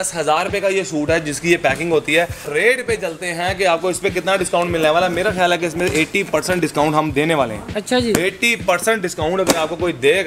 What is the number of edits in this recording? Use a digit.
1